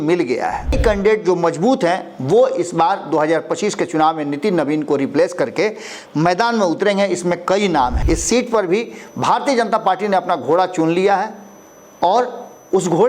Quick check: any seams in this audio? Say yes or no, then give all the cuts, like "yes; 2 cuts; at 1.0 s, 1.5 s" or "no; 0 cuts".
yes; 2 cuts; at 0.8 s, 8.0 s